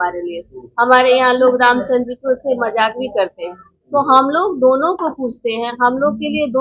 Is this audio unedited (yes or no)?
yes